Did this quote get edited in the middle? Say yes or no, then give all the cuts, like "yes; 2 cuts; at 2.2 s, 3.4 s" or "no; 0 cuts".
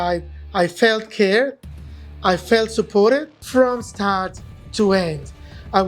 yes; 1 cut; at 3.4 s